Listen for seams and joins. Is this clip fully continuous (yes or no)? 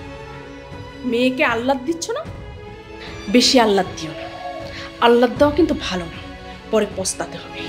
yes